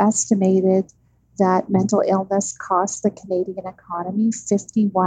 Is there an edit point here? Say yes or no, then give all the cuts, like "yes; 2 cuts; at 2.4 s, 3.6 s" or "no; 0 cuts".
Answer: no; 0 cuts